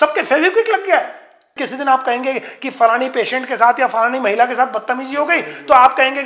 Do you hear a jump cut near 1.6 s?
yes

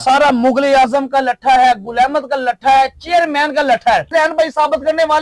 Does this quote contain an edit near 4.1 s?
yes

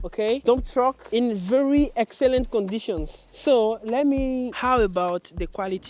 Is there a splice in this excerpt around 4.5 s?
yes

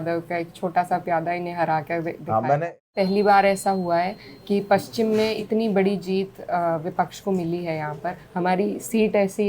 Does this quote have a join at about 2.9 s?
yes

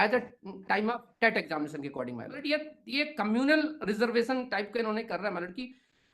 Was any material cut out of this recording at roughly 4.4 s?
no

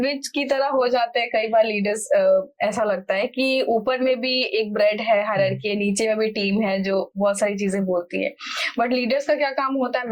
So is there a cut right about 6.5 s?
no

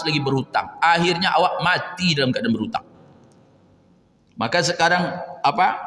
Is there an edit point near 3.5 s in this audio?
no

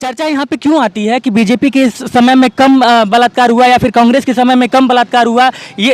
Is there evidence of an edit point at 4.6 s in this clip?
no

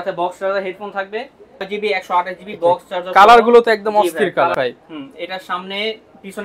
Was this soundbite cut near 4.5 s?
yes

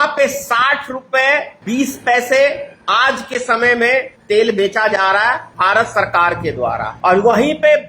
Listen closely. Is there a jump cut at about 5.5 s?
yes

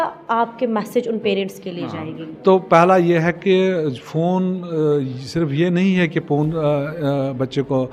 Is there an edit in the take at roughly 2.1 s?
no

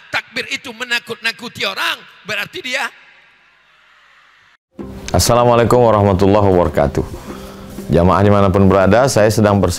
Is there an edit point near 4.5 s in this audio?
yes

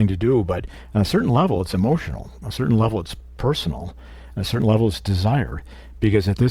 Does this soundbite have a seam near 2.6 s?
no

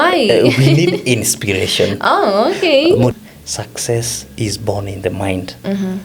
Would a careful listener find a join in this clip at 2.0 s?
no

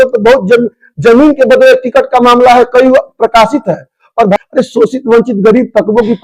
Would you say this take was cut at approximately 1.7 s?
no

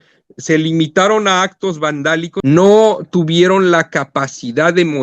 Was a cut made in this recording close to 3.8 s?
no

